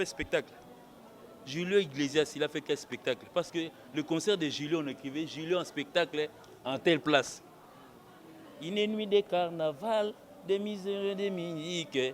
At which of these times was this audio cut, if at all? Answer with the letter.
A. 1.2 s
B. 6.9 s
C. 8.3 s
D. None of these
D